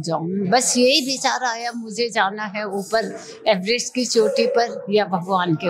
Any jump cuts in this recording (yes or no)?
no